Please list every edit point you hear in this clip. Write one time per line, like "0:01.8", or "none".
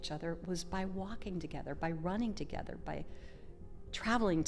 none